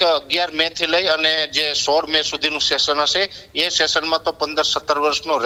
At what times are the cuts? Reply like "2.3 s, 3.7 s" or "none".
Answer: none